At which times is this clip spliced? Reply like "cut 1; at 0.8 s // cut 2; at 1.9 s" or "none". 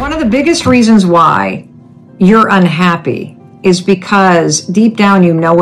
none